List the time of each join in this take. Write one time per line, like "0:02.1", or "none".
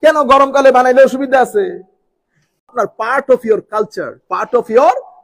0:02.7